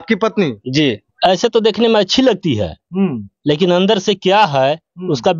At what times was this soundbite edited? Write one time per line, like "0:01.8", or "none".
0:01.1